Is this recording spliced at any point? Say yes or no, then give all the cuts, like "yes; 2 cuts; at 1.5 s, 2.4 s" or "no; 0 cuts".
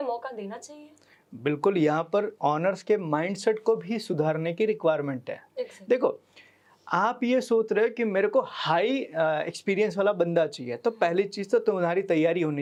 no; 0 cuts